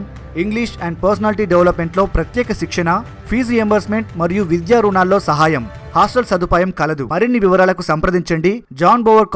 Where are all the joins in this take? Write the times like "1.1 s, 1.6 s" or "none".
7.0 s